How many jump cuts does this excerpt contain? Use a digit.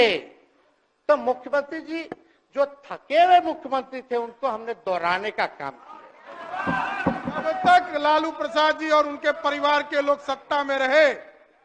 1